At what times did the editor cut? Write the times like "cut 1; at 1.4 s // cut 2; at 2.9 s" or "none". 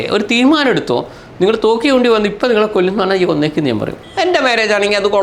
cut 1; at 4.0 s